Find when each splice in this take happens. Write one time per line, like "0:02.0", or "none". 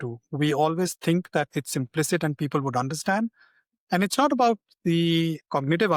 none